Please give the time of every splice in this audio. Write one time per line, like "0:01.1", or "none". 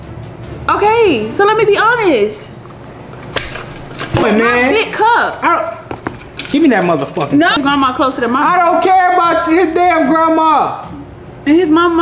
0:04.2
0:07.6